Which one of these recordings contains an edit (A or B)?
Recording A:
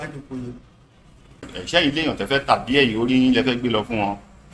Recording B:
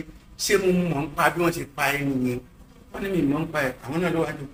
A